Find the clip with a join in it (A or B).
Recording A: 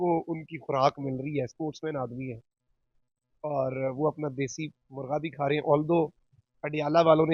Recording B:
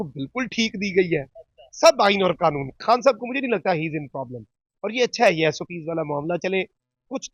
B